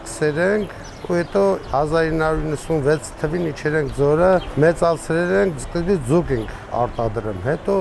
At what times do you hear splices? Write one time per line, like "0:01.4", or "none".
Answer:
none